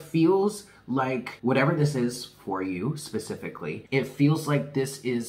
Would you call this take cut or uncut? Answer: cut